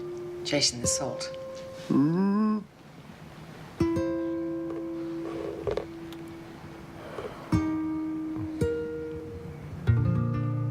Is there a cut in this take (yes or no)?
yes